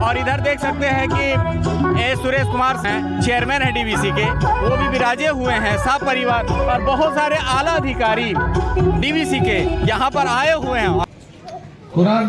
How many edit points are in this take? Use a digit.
2